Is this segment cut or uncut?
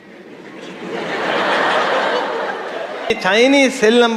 cut